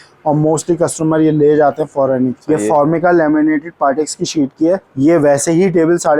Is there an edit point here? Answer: yes; 2 cuts; at 2.4 s, 4.9 s

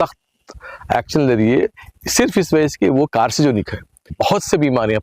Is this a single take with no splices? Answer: no; 1 cut; at 4.1 s

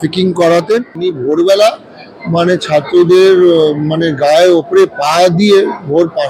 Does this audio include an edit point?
yes; 1 cut; at 0.9 s

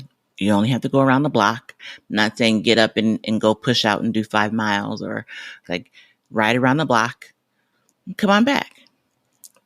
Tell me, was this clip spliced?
yes; 2 cuts; at 1.8 s, 5.7 s

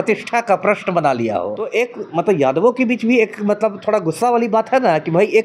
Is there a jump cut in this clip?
yes; 1 cut; at 1.6 s

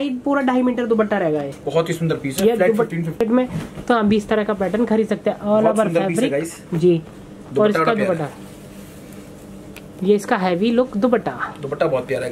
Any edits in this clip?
yes; 1 cut; at 3.2 s

